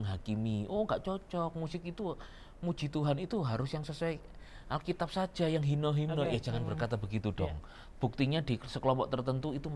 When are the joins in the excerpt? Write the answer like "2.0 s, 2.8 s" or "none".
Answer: none